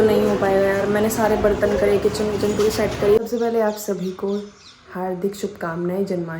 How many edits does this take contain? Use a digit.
1